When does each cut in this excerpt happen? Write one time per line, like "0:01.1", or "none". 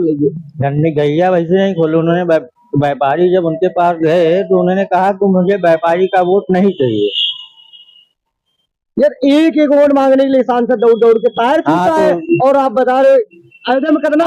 none